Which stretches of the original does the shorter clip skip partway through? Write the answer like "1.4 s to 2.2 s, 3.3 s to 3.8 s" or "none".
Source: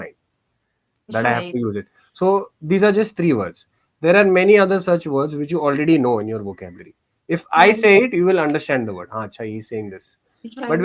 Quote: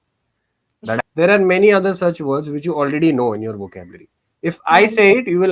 1.2 s to 3.8 s

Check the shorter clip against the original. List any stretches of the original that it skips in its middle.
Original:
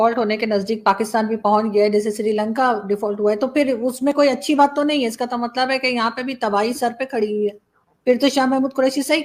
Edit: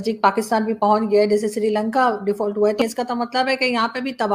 3.5 s to 5.1 s

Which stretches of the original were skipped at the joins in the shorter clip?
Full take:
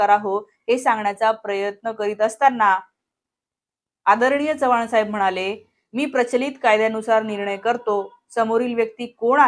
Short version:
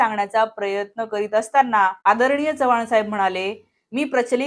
2.8 s to 4.0 s

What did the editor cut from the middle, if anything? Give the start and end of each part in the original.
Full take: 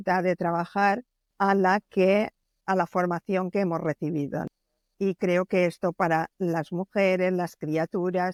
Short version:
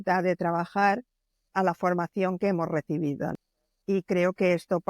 1.3 s to 2.4 s

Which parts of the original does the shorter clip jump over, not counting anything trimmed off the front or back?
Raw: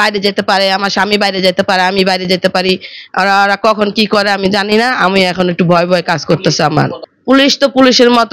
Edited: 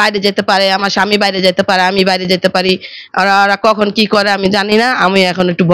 none

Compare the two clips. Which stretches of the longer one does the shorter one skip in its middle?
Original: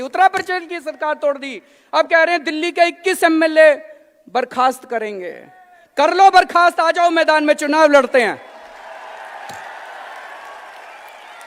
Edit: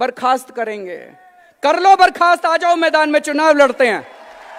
none

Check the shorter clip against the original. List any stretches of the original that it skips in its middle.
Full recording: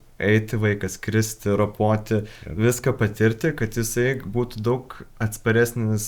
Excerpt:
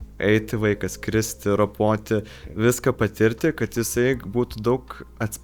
none

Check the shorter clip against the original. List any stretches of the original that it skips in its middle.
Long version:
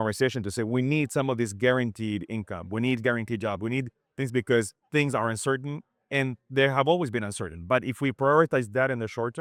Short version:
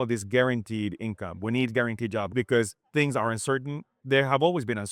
3.6 s to 4.3 s, 5.9 s to 6.4 s

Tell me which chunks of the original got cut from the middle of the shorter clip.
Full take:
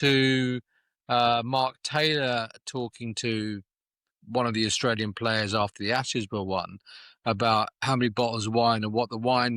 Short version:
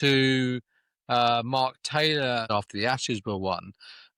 2.5 s to 5.5 s

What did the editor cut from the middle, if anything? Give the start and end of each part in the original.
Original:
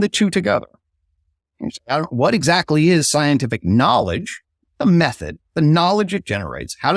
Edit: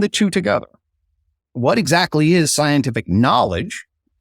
1.5 s to 2.1 s

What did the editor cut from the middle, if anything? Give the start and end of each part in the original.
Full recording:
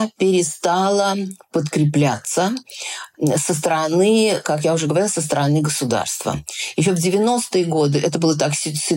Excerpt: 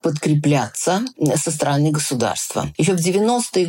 2.9 s to 5.1 s, 6.4 s to 6.7 s

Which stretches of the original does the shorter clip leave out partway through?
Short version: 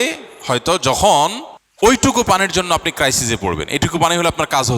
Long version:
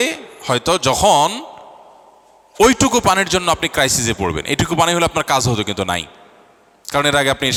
1.9 s to 2.7 s

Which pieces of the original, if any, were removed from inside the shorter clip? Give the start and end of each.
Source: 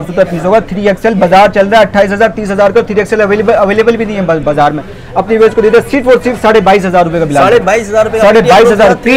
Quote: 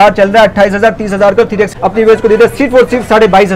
3.1 s to 5.0 s

